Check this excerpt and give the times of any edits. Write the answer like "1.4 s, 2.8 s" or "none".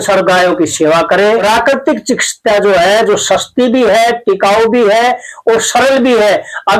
1.4 s